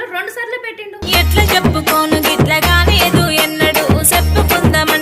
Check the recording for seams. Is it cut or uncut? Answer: cut